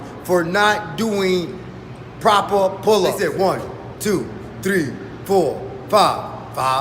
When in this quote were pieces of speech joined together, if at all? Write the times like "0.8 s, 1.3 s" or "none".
3.2 s